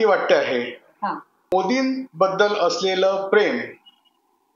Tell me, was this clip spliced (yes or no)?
yes